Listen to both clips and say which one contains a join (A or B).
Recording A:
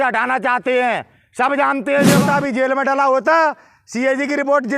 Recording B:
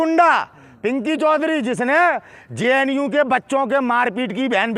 A